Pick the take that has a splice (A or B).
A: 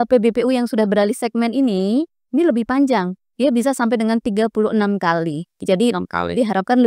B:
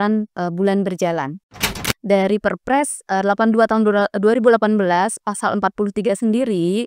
B